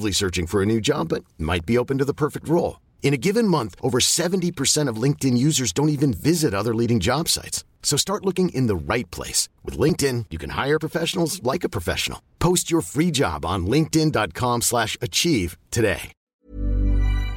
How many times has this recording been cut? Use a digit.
1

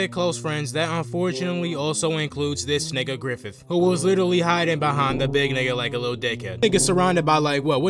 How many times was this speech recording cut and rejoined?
1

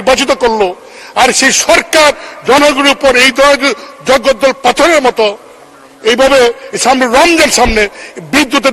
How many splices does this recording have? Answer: 0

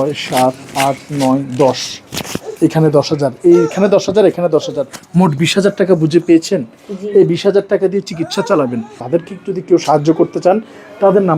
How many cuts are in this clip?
1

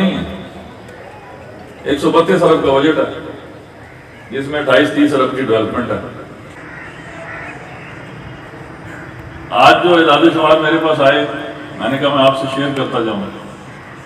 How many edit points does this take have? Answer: 1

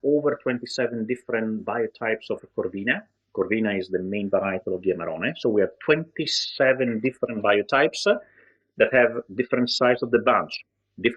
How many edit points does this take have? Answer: 0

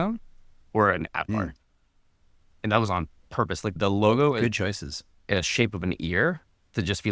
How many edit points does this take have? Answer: 0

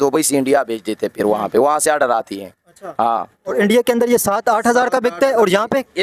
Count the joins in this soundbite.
0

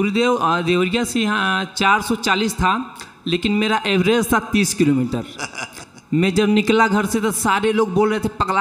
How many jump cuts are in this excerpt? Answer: 0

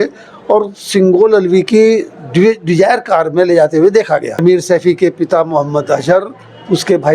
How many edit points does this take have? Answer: 1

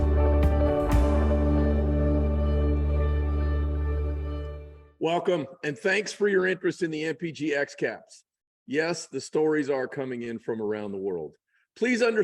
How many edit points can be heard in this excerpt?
1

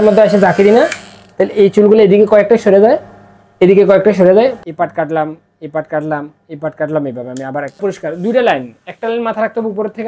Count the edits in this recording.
2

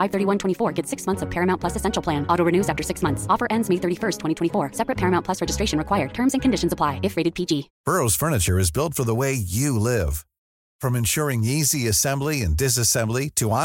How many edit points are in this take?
1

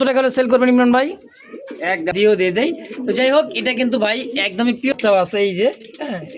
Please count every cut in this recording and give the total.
2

